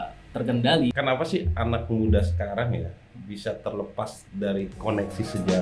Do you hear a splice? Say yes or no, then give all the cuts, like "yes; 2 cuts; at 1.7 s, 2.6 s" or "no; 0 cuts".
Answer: yes; 1 cut; at 0.9 s